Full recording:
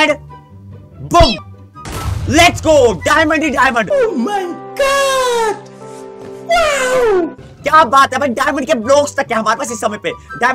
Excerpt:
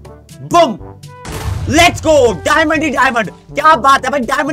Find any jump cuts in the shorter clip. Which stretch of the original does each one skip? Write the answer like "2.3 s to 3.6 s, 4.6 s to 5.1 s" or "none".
3.9 s to 7.3 s